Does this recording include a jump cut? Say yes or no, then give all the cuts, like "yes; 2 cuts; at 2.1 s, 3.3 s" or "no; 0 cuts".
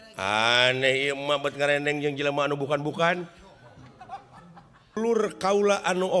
yes; 1 cut; at 5.0 s